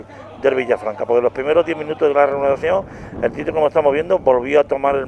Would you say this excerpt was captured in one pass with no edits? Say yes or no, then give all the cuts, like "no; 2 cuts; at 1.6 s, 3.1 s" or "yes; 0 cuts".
no; 1 cut; at 3.0 s